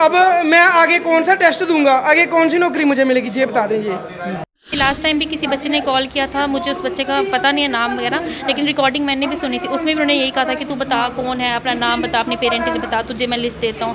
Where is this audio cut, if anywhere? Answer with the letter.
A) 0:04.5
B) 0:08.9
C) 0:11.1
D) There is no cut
A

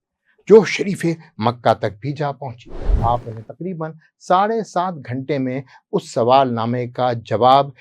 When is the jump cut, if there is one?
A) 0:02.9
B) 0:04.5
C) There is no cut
A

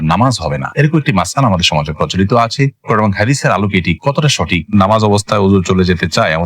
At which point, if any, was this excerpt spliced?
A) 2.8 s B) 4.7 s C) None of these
B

